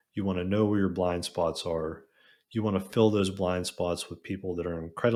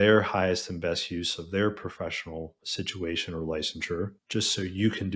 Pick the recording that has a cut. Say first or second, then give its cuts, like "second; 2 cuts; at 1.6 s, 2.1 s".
second; 2 cuts; at 2.6 s, 4.2 s